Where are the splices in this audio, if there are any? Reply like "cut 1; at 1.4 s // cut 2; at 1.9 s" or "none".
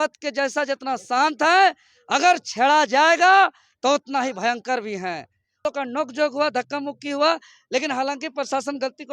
cut 1; at 5.4 s

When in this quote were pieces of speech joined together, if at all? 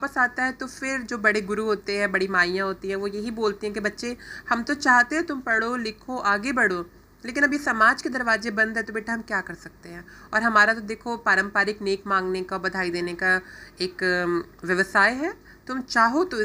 none

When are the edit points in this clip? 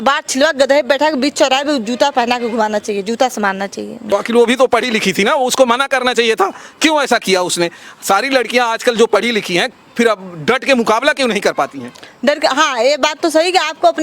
cut 1; at 4.0 s

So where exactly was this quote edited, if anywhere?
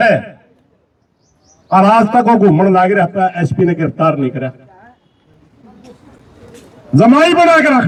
none

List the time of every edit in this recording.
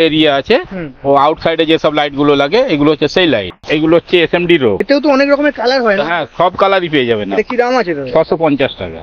cut 1; at 3.5 s // cut 2; at 4.9 s

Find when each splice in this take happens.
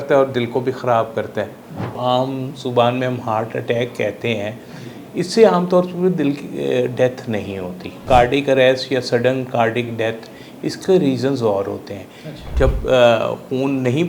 cut 1; at 2.0 s // cut 2; at 8.0 s // cut 3; at 12.4 s

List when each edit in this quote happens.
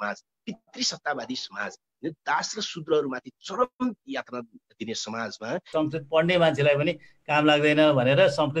cut 1; at 5.7 s

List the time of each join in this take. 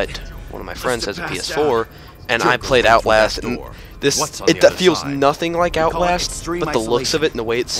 cut 1; at 5.1 s

